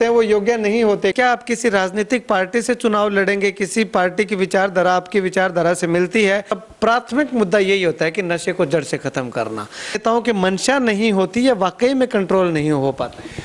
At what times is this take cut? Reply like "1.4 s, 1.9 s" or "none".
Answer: 1.1 s, 6.6 s, 10.0 s

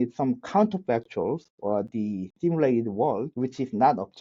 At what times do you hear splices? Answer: 3.3 s

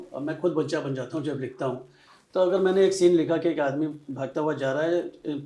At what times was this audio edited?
none

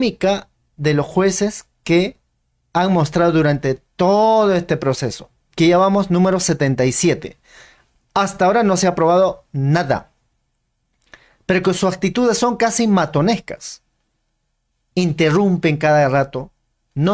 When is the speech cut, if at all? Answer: none

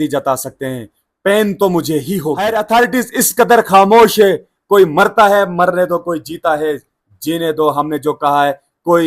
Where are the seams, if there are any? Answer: 2.4 s

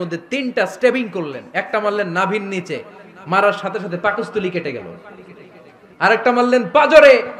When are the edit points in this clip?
none

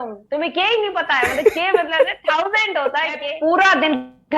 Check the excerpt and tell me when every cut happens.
3.2 s

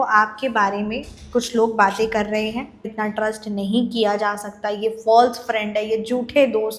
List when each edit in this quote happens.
2.9 s

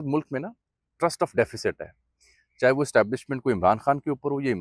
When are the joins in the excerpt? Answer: none

